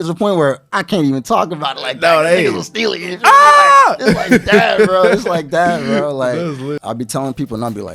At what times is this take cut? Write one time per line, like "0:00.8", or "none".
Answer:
0:06.8